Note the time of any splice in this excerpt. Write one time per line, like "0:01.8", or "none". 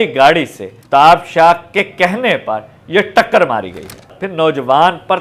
0:04.1